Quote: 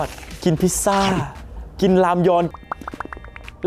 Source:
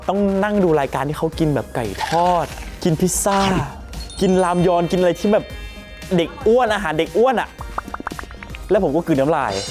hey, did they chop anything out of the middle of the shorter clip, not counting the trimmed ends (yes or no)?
yes